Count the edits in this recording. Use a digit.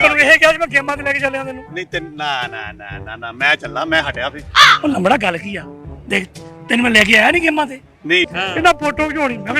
1